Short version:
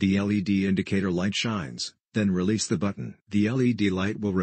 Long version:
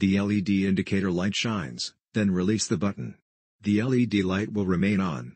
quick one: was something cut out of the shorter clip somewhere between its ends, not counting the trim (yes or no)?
yes